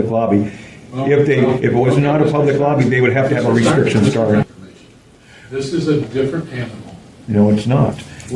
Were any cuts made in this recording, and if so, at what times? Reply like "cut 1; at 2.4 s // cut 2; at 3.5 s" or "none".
cut 1; at 4.4 s